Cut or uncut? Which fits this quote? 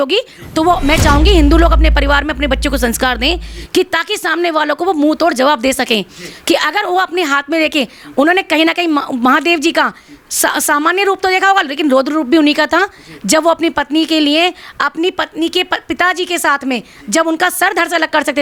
uncut